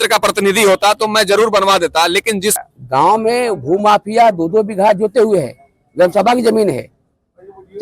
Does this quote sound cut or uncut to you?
cut